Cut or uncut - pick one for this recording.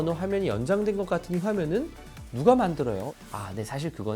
cut